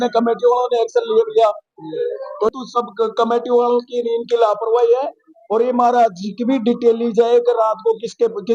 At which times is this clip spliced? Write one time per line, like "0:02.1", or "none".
0:02.5